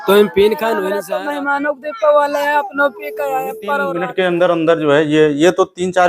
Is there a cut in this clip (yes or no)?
yes